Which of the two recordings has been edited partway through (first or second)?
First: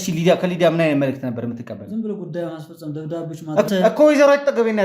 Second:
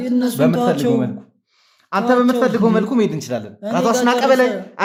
first